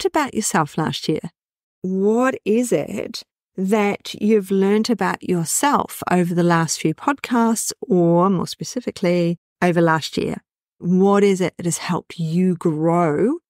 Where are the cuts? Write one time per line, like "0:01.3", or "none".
0:01.5